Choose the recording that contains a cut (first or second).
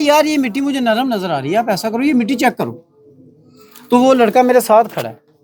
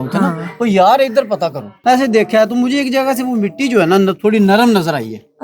second